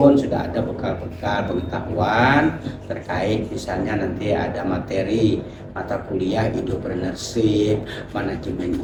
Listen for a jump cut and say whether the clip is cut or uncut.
uncut